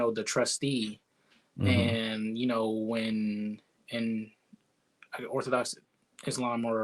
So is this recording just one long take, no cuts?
yes; 0 cuts

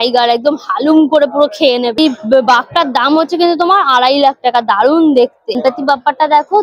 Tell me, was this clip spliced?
no; 0 cuts

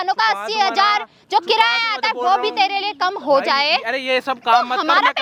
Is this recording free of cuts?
yes; 0 cuts

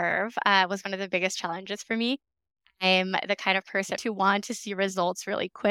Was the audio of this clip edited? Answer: yes; 1 cut; at 4.0 s

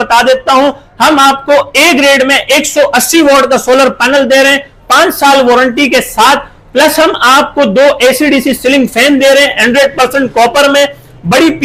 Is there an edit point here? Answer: no; 0 cuts

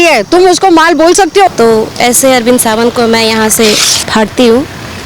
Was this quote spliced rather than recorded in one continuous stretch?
yes; 1 cut; at 1.5 s

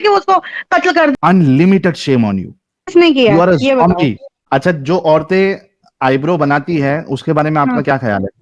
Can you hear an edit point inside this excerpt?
yes; 2 cuts; at 1.1 s, 4.3 s

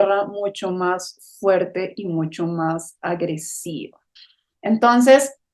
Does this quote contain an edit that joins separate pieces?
yes; 1 cut; at 4.1 s

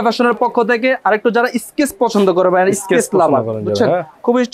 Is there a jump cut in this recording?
no; 0 cuts

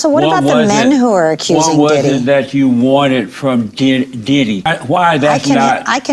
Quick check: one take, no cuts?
no; 1 cut; at 4.7 s

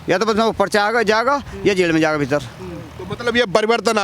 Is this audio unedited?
yes; 0 cuts

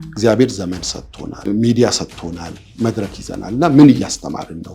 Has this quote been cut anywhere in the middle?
yes; 2 cuts; at 1.4 s, 2.6 s

